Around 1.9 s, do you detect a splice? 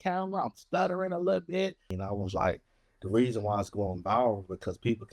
yes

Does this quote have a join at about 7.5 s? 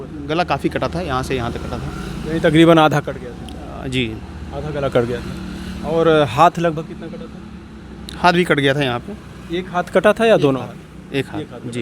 no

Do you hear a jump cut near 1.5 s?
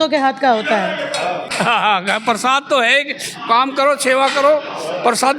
yes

